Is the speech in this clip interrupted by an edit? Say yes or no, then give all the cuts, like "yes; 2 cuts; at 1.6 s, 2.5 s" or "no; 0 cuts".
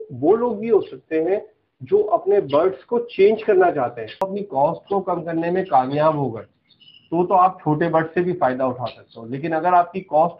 yes; 1 cut; at 4.3 s